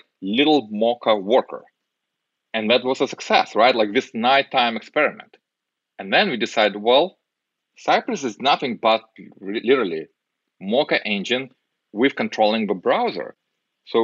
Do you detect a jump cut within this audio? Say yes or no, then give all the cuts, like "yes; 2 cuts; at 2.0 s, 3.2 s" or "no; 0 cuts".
no; 0 cuts